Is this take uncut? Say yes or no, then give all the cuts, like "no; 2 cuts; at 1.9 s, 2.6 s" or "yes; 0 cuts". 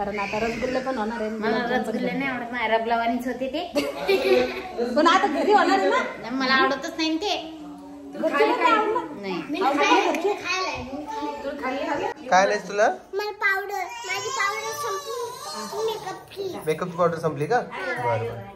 no; 1 cut; at 12.2 s